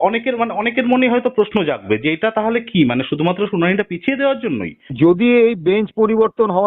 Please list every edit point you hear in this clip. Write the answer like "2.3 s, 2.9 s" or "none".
4.9 s